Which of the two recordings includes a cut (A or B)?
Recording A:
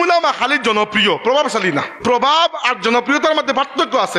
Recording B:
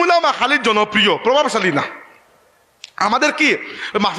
A